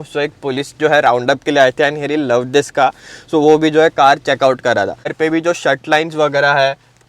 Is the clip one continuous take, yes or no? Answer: no